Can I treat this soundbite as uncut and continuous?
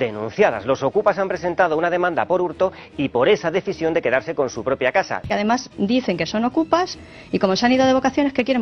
no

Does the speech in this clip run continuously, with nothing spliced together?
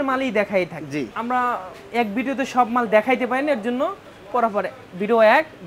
no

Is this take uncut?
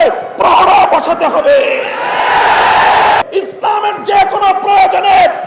no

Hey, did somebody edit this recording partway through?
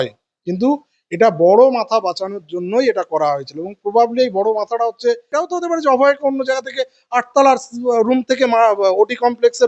yes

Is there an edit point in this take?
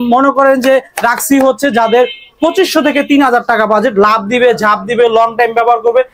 no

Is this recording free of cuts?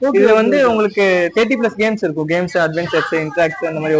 yes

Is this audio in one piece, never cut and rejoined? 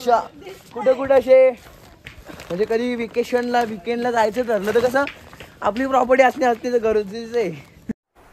yes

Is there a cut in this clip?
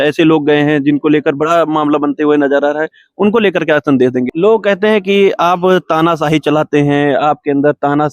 yes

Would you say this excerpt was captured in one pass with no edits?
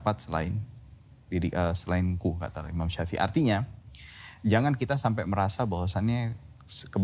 yes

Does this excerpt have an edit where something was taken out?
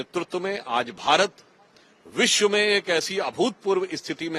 no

